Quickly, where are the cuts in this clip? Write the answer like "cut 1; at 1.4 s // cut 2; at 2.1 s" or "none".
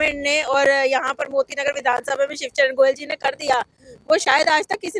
none